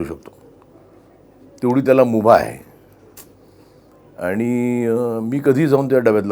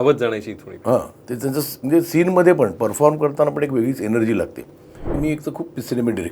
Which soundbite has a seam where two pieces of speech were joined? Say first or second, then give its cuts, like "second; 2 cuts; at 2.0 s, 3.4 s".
second; 1 cut; at 5.2 s